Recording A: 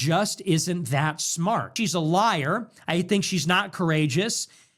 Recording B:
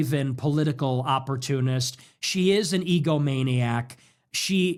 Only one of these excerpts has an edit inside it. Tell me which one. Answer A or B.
A